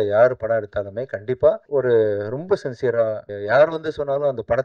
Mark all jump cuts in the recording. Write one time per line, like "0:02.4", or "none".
0:01.6
0:03.3